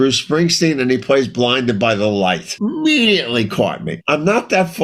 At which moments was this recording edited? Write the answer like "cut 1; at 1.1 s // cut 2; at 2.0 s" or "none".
cut 1; at 2.5 s // cut 2; at 3.9 s